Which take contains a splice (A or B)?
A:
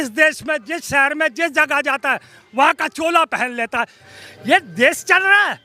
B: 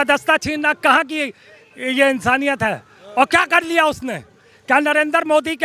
A